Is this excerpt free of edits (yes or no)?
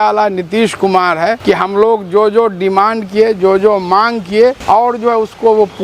no